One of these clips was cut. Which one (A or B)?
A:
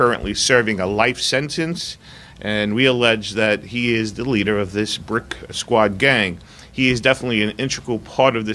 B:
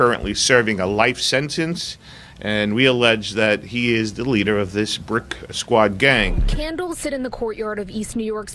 B